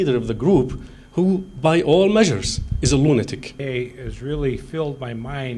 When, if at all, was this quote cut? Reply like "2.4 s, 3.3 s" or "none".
3.5 s